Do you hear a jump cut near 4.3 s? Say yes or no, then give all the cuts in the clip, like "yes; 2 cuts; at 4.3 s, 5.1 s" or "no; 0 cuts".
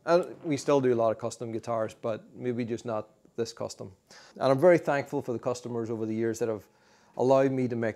yes; 1 cut; at 4.3 s